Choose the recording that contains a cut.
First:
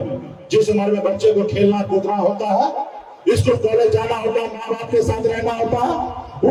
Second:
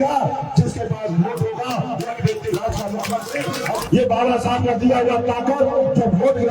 second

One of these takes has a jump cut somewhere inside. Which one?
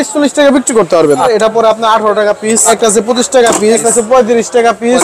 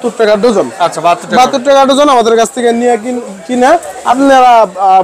first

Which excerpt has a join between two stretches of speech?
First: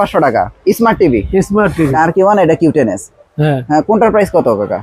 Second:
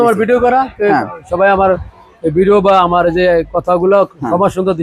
first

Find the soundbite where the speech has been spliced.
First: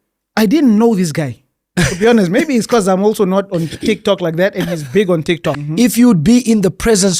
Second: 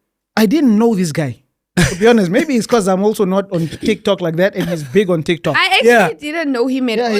first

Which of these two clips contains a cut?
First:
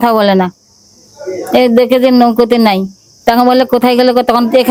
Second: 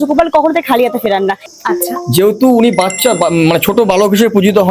second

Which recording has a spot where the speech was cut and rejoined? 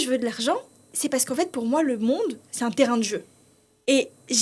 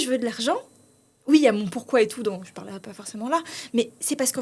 first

